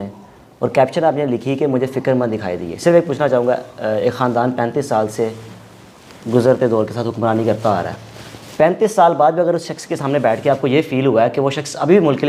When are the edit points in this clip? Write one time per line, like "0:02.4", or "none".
none

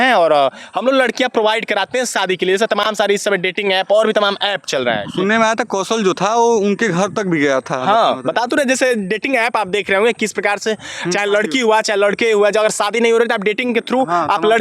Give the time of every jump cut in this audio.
none

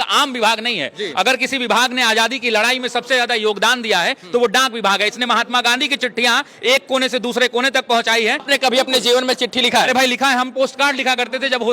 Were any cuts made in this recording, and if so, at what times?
0:08.4

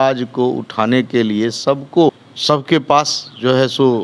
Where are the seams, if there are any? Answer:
0:02.1

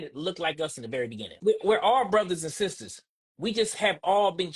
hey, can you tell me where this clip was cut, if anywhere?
0:01.4

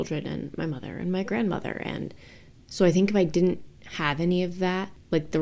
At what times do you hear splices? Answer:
0:02.5

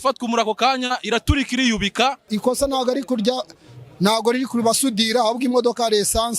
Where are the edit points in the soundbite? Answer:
0:02.2

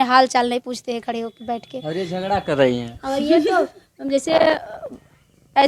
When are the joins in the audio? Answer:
none

